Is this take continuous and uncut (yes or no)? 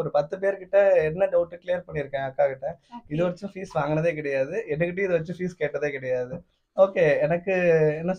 yes